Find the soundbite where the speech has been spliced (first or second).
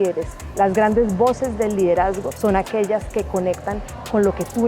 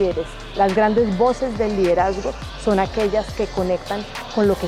first